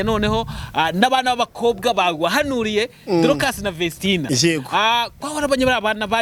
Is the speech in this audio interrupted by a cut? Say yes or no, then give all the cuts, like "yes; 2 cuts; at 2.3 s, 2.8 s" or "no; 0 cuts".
no; 0 cuts